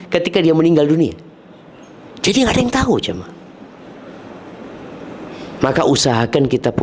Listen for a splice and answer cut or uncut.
uncut